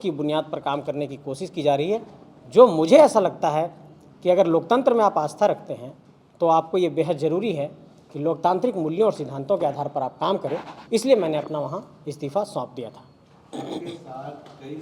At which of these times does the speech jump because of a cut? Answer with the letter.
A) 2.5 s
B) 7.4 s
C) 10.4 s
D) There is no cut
D